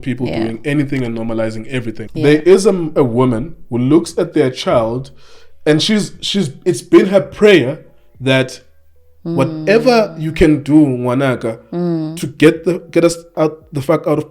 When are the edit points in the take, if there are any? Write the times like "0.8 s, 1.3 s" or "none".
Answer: 2.0 s